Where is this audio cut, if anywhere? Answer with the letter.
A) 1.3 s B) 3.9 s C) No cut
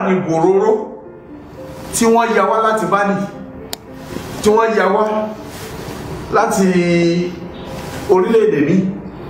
C